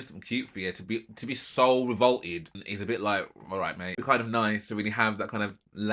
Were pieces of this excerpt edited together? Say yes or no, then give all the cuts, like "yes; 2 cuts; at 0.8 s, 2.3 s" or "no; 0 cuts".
yes; 2 cuts; at 2.6 s, 3.9 s